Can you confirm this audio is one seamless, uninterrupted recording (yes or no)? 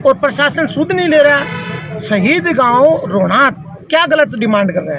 yes